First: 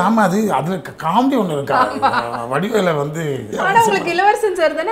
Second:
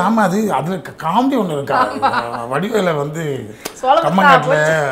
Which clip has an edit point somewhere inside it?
first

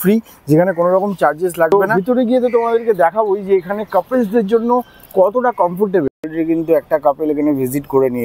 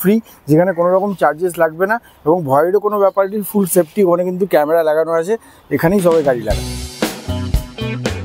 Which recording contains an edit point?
first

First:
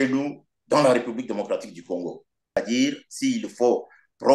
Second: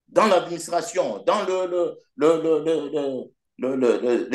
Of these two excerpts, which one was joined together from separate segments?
first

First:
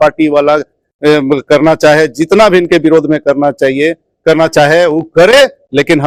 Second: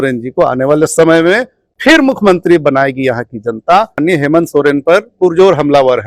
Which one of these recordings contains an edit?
second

